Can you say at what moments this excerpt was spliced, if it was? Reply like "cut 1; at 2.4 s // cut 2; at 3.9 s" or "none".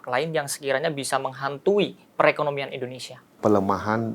cut 1; at 3.2 s